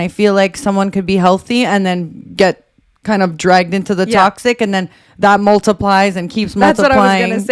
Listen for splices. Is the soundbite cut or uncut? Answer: uncut